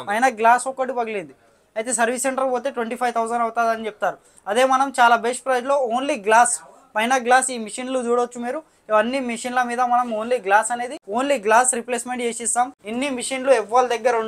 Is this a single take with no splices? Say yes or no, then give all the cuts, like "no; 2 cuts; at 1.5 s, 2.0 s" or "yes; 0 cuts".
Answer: no; 2 cuts; at 11.0 s, 12.8 s